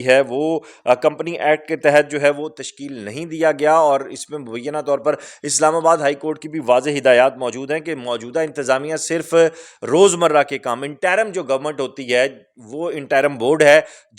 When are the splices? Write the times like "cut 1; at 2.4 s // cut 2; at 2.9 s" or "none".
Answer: none